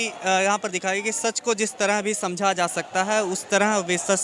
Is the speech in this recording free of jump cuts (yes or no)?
yes